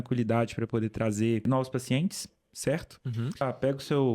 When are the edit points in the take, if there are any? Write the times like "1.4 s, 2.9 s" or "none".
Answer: 1.4 s, 3.4 s